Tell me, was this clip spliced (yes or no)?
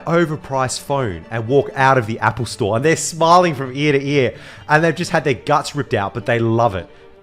no